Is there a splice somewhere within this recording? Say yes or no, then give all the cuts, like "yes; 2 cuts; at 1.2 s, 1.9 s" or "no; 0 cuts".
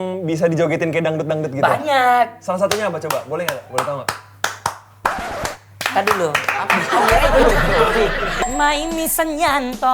yes; 1 cut; at 8.3 s